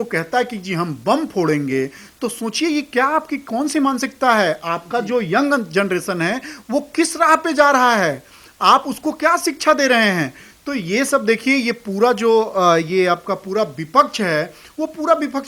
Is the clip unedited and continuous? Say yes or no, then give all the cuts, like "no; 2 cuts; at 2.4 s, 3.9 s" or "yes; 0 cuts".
yes; 0 cuts